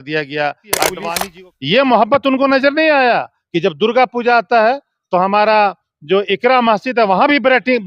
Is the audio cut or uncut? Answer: cut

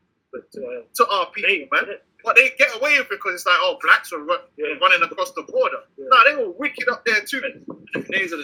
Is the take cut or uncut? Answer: uncut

